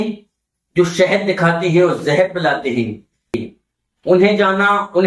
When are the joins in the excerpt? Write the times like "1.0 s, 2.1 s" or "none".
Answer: 3.4 s